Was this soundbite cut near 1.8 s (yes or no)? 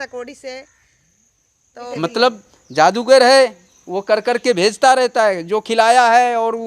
yes